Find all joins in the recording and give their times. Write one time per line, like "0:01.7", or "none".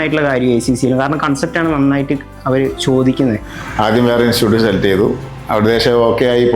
0:03.5

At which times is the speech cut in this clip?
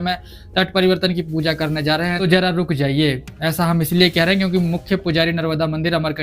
0:02.2

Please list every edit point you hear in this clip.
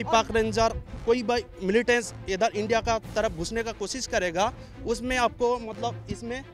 none

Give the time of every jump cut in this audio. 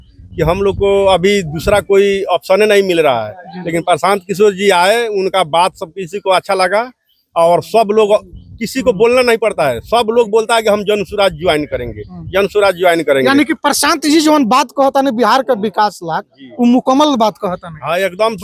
none

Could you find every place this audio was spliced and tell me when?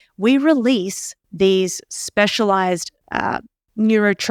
none

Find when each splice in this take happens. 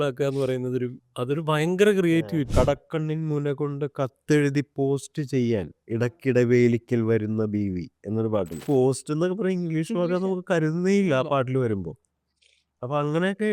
0:02.5
0:08.6

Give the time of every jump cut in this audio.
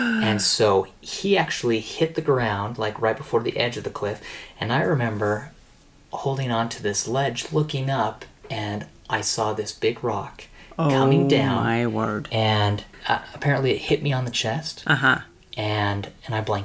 0:12.9

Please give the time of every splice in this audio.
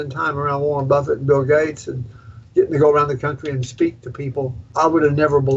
0:04.6

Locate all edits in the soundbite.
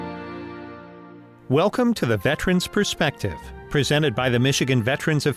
none

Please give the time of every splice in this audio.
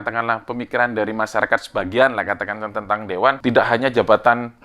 0:03.4

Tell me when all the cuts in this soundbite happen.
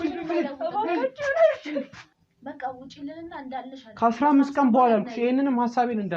0:02.1

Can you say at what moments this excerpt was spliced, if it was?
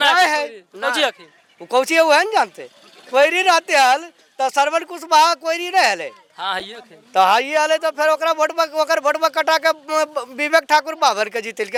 none

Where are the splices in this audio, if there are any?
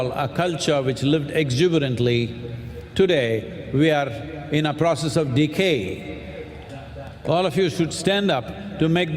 0:06.6

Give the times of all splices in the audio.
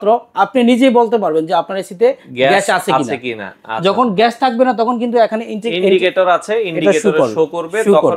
none

